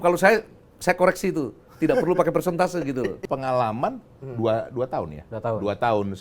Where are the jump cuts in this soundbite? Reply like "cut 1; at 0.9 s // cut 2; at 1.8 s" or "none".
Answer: cut 1; at 3.2 s